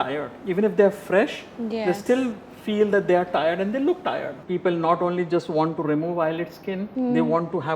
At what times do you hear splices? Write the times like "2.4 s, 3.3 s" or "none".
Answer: 4.3 s, 6.9 s